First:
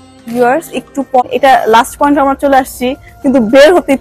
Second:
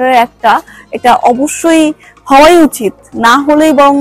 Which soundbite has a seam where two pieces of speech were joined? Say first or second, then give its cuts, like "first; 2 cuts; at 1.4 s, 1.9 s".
first; 1 cut; at 1.2 s